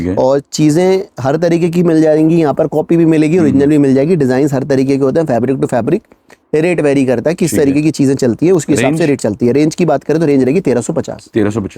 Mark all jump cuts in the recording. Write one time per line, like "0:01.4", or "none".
none